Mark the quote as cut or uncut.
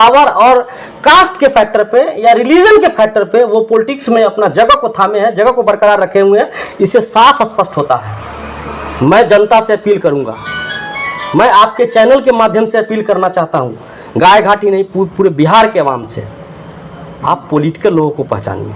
uncut